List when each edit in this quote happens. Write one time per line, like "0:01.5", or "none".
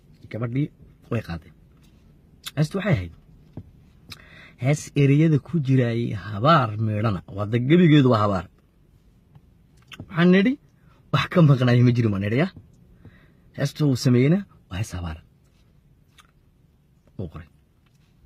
none